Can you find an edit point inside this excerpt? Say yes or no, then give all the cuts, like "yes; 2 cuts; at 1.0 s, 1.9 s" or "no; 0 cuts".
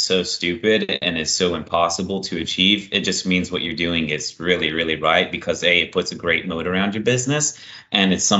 no; 0 cuts